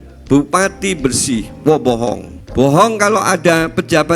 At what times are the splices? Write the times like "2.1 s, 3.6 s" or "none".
2.3 s